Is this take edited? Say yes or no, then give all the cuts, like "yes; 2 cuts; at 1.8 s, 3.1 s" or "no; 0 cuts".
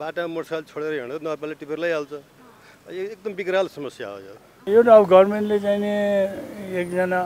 yes; 1 cut; at 4.6 s